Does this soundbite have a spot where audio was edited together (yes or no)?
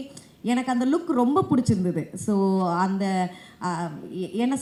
no